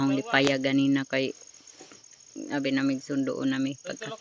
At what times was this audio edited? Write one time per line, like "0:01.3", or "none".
none